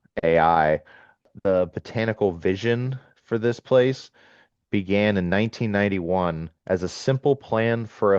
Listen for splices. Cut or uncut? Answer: cut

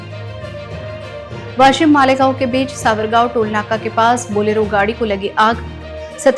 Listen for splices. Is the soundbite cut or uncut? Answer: cut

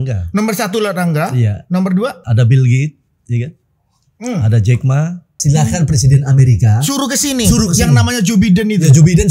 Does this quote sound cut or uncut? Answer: cut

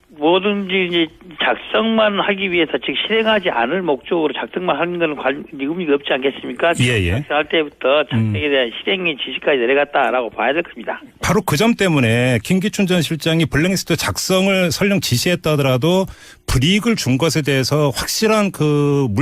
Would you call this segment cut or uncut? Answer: uncut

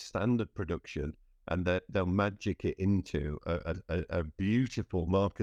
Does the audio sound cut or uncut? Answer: uncut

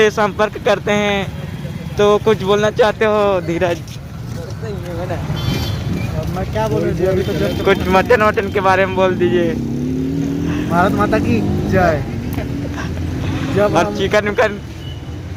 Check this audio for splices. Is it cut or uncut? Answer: uncut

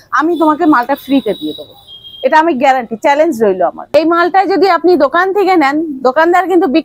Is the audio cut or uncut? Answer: cut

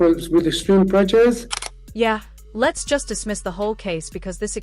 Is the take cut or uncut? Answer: uncut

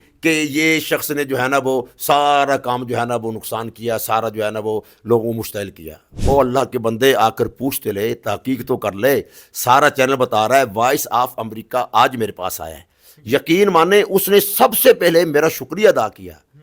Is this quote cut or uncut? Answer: uncut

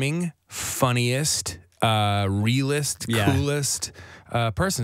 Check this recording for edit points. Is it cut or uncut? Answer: uncut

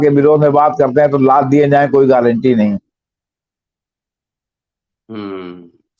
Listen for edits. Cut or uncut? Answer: uncut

